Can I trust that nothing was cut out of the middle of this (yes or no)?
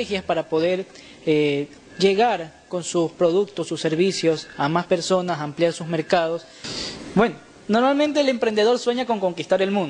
no